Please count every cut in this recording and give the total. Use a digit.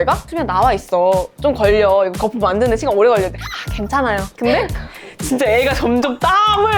1